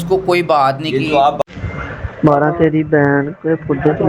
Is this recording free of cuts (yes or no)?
no